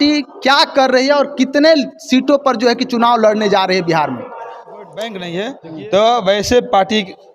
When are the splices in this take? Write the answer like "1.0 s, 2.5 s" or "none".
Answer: 5.2 s